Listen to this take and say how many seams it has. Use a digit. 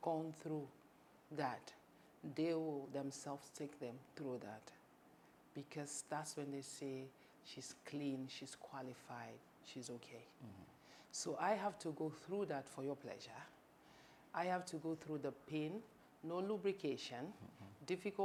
0